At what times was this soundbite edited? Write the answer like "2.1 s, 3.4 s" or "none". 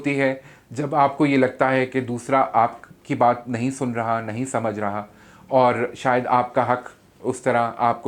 none